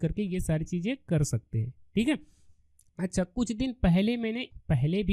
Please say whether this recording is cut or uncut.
uncut